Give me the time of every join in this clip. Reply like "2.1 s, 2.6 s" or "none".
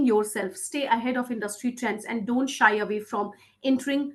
none